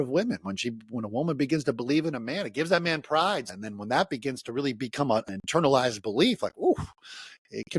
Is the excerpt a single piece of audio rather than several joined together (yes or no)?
no